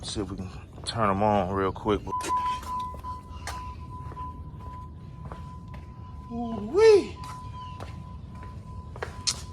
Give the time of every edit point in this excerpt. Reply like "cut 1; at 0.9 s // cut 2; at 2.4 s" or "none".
cut 1; at 2.1 s

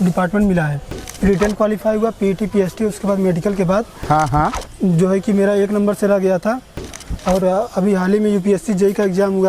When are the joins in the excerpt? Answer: cut 1; at 1.0 s

